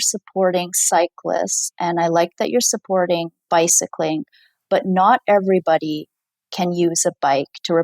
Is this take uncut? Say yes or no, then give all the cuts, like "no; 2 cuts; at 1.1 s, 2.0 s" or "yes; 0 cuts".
yes; 0 cuts